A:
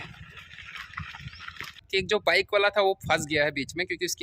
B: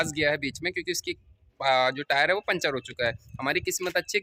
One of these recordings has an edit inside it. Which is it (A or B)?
A